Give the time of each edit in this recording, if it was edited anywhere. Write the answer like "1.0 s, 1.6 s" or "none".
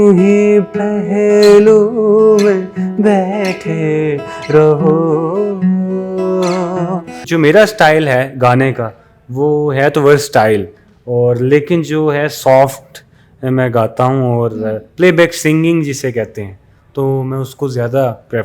7.2 s